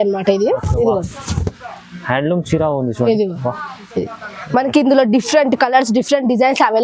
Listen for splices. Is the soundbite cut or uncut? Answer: uncut